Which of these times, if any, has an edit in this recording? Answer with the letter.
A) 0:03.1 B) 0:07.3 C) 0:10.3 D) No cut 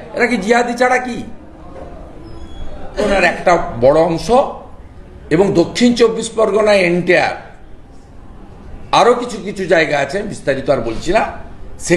A